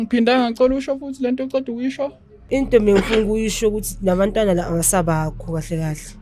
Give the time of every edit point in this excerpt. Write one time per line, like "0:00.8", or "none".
0:02.3